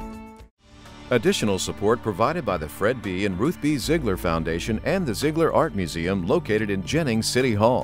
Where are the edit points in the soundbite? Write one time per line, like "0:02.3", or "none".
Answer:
0:00.9